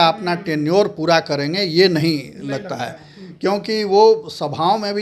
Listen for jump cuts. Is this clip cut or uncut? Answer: uncut